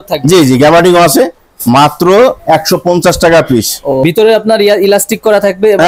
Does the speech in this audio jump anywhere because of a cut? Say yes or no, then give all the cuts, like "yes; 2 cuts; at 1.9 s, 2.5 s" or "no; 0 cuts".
yes; 1 cut; at 4.0 s